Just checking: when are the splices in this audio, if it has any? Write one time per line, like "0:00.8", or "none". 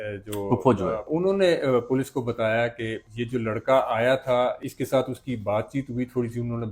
0:01.1